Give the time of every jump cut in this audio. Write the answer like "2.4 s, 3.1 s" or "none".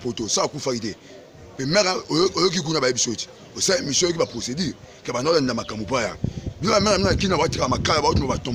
none